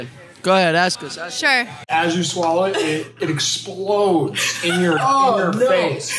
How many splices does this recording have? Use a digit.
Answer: 1